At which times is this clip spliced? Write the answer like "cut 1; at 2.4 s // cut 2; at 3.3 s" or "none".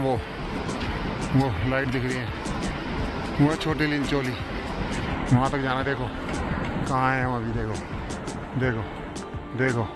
none